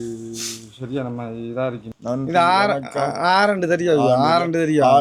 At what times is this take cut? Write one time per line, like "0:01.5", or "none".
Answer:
0:01.9